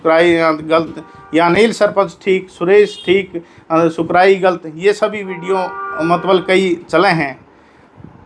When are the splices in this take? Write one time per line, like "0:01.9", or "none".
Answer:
none